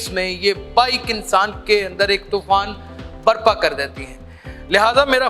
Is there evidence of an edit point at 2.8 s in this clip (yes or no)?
no